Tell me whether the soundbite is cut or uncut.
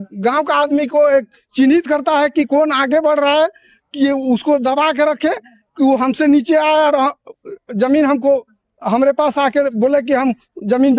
uncut